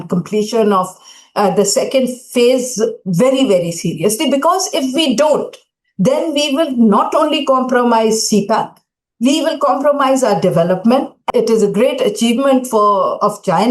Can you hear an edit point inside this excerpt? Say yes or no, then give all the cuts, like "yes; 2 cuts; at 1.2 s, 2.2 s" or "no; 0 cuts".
yes; 1 cut; at 11.2 s